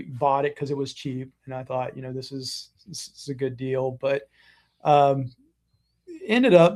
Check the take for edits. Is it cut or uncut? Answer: uncut